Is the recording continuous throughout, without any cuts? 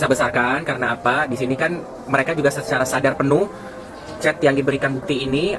yes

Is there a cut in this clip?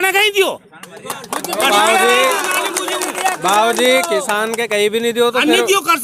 no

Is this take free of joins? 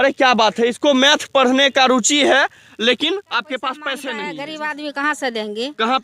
no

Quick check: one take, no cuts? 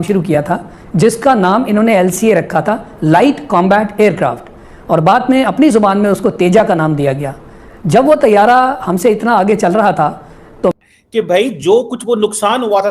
no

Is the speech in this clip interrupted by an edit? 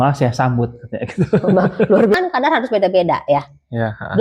yes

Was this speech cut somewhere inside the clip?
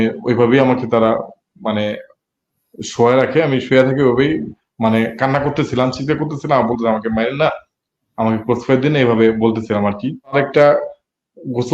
yes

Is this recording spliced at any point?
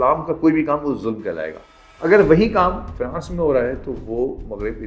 no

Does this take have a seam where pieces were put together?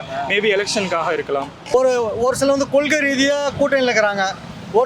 yes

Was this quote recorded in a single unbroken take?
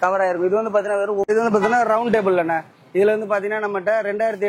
no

